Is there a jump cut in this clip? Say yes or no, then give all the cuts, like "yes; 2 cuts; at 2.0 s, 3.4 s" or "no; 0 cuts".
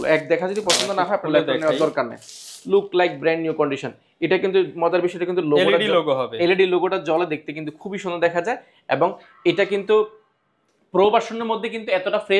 no; 0 cuts